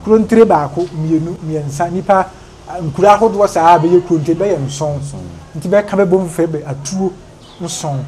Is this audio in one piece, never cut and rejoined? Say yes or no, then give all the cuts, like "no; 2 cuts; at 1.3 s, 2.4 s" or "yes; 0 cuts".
yes; 0 cuts